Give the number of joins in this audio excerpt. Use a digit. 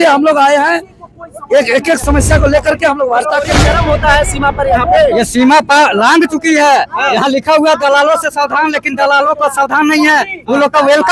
1